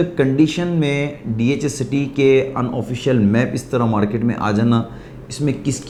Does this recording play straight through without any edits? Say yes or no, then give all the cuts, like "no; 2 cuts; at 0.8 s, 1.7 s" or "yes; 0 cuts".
yes; 0 cuts